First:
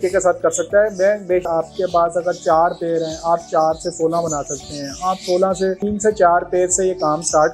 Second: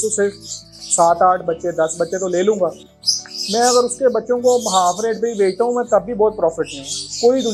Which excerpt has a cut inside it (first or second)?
first